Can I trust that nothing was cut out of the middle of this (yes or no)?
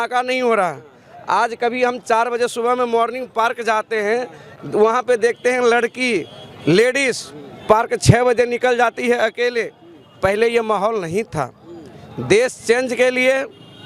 yes